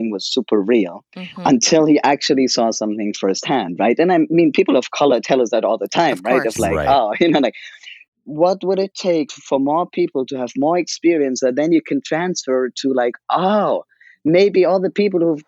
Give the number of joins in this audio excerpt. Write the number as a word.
two